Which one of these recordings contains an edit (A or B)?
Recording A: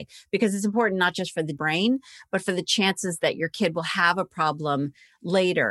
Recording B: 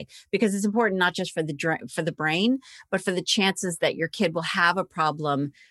A